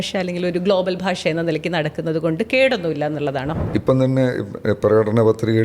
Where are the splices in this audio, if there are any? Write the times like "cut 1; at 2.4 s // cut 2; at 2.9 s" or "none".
cut 1; at 3.6 s